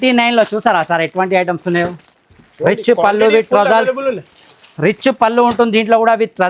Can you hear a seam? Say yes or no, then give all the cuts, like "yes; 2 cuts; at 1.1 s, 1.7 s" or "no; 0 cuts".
no; 0 cuts